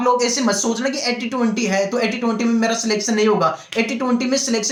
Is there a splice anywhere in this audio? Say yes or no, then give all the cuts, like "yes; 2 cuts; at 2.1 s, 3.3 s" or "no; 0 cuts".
no; 0 cuts